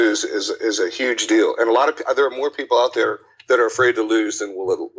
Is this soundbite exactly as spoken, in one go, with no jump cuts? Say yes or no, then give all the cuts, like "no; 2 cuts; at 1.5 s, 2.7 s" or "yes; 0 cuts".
yes; 0 cuts